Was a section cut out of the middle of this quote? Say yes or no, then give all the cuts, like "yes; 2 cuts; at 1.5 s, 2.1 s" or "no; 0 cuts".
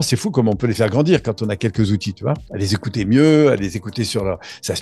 no; 0 cuts